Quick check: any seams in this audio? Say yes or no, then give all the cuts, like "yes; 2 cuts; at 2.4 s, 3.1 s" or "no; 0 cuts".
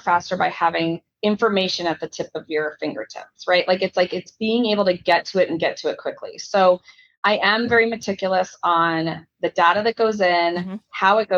yes; 1 cut; at 1.1 s